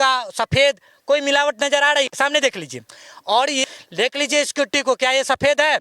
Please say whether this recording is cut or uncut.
cut